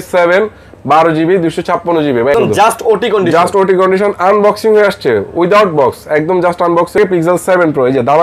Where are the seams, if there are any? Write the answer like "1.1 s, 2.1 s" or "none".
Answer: 2.3 s, 7.0 s